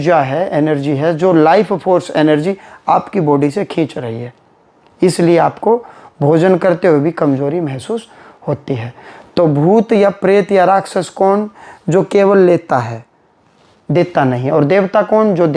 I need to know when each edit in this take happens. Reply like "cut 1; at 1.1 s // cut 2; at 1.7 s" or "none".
none